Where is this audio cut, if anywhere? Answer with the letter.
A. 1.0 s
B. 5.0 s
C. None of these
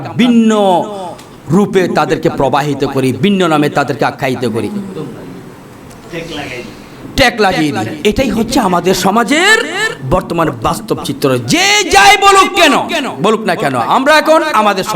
C